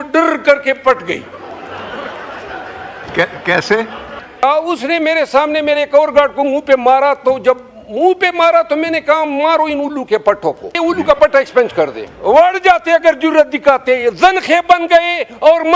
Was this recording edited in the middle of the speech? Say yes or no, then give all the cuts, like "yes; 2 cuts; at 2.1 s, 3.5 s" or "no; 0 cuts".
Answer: yes; 3 cuts; at 4.4 s, 10.7 s, 12.1 s